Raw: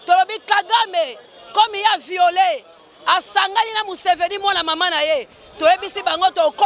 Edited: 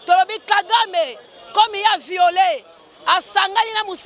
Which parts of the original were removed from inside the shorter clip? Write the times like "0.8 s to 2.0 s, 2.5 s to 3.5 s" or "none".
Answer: none